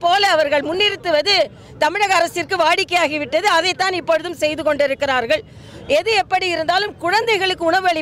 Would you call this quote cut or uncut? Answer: uncut